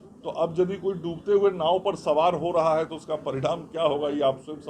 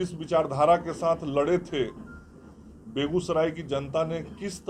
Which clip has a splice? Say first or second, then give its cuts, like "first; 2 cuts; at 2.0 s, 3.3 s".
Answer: first; 1 cut; at 3.3 s